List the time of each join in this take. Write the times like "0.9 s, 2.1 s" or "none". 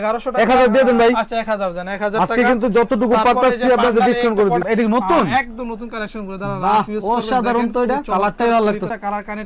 4.6 s